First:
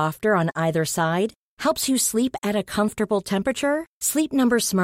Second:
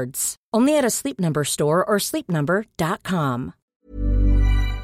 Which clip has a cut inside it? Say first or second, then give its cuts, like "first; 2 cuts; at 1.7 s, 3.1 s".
second; 1 cut; at 3.7 s